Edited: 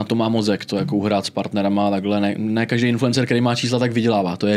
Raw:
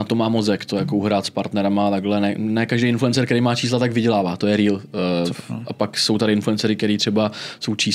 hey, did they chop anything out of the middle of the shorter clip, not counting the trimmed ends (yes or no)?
no